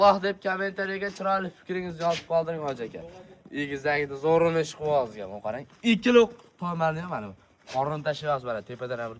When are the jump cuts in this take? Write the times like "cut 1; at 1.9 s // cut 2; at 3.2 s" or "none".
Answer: none